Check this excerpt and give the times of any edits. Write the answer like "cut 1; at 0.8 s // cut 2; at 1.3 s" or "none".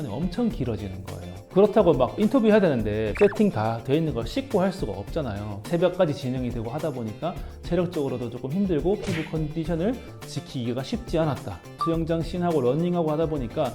cut 1; at 11.7 s